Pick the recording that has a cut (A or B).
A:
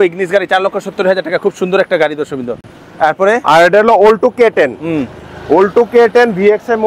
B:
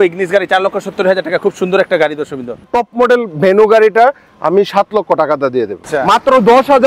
B